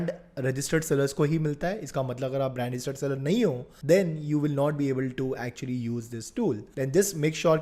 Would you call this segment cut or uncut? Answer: uncut